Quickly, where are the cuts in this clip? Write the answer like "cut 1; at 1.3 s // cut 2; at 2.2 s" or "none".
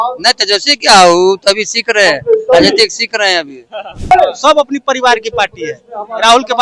cut 1; at 4.1 s